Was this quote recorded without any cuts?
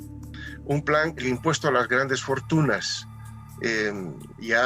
no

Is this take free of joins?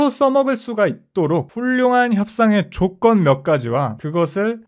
no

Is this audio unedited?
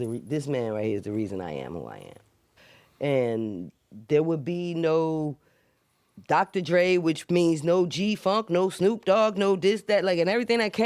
yes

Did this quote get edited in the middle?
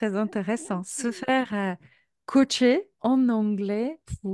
no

